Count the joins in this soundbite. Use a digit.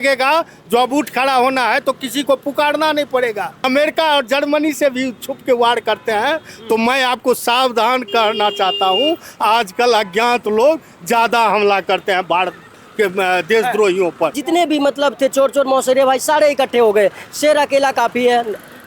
2